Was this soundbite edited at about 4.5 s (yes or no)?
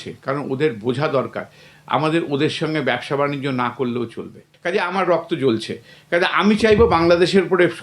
yes